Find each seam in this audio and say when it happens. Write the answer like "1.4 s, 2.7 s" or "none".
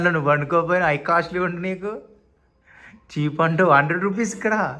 none